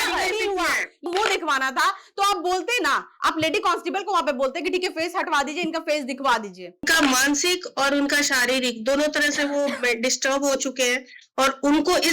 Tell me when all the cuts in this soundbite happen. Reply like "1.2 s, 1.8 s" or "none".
1.0 s, 6.9 s

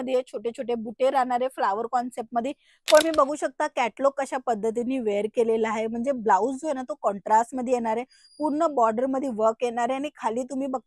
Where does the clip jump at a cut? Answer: 3.0 s

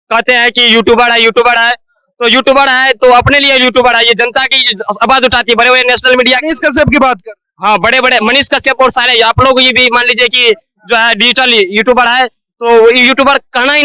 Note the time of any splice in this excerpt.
none

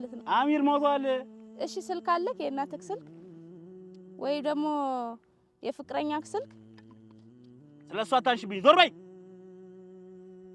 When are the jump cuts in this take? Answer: 6.5 s, 7.9 s, 8.9 s

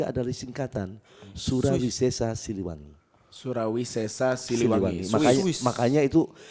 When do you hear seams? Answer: none

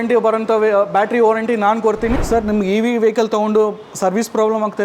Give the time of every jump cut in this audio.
2.1 s

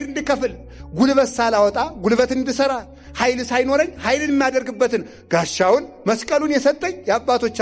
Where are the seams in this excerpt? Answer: none

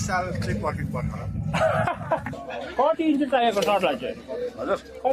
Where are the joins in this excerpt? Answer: 2.3 s

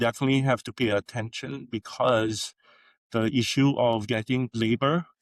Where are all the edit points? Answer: none

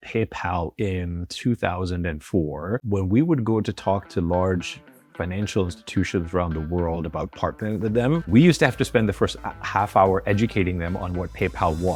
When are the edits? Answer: none

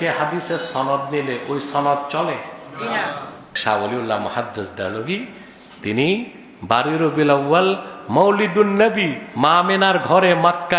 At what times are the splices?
3.4 s

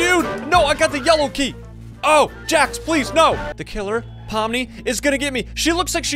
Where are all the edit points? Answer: 3.6 s

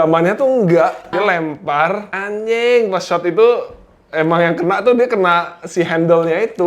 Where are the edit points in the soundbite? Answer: 1.1 s, 2.1 s

